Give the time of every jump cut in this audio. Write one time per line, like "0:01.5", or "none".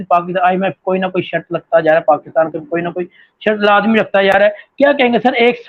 none